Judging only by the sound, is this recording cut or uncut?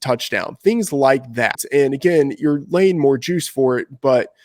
cut